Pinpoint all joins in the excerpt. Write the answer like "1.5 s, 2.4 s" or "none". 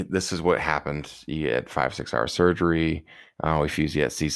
none